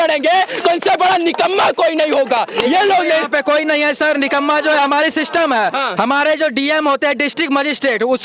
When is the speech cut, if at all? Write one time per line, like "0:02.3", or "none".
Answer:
none